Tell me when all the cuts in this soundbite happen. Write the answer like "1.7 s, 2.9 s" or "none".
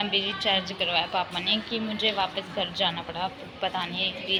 none